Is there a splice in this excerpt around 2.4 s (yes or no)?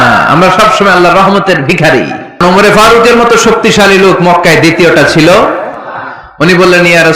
yes